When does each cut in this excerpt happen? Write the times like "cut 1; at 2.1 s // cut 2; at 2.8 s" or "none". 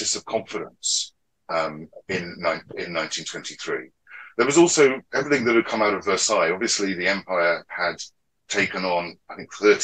none